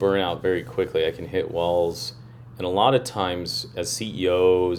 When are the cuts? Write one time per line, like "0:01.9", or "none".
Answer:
0:03.6